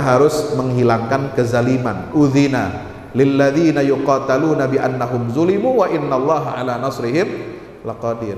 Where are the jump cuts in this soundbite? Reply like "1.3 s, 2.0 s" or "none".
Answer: none